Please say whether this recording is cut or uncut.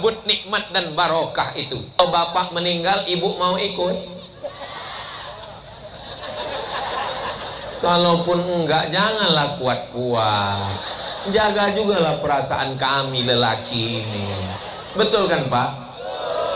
cut